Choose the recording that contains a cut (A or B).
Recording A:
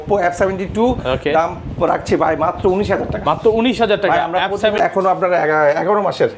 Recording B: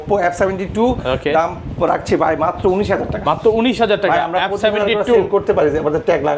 A